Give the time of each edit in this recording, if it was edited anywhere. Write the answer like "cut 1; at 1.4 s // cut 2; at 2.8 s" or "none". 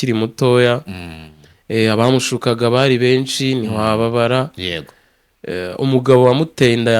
none